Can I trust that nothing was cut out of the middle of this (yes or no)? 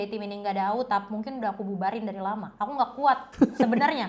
no